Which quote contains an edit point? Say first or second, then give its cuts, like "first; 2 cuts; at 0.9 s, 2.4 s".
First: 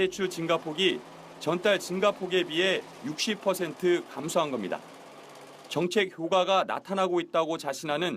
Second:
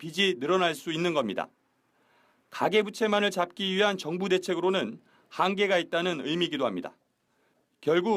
first; 1 cut; at 6.7 s